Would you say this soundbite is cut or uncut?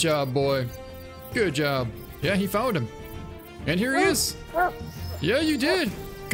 cut